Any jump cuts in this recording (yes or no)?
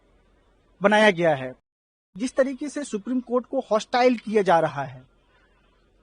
yes